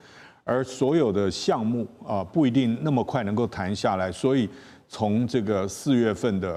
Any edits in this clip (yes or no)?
no